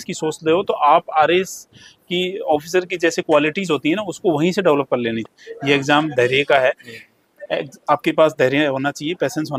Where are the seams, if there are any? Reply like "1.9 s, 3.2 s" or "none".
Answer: 5.2 s